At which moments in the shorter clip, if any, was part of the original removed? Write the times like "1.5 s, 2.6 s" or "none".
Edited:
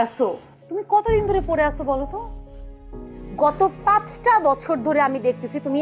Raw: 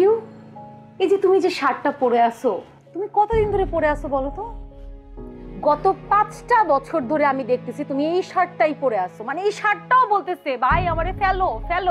none